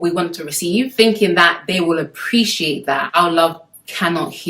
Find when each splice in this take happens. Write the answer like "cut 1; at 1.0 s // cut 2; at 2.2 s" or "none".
cut 1; at 3.1 s